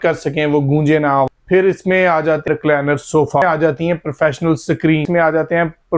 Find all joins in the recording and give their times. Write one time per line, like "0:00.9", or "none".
0:01.3
0:02.5
0:03.4
0:05.0